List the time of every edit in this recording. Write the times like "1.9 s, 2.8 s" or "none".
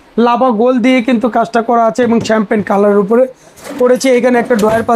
none